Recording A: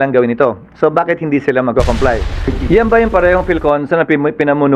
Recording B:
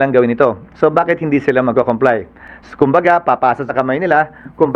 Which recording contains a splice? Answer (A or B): A